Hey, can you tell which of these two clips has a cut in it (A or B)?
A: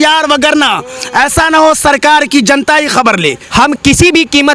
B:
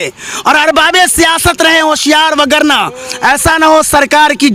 A